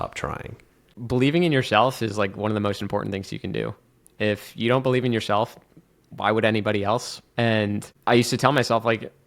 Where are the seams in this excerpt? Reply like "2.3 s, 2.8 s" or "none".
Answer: 0.9 s, 7.2 s